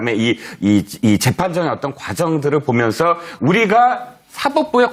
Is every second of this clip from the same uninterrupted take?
yes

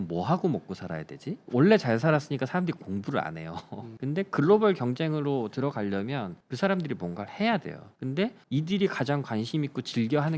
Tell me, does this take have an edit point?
yes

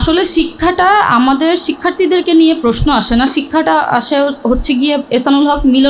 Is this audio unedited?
yes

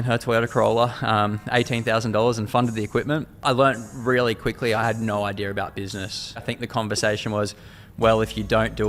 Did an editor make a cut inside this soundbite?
yes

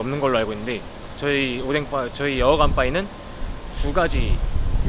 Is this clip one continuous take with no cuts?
yes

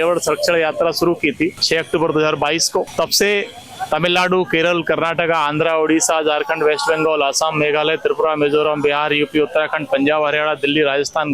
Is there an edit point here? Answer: no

